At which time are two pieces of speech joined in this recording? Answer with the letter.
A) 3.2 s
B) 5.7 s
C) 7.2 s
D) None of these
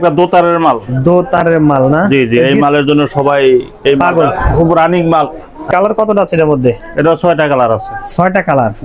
B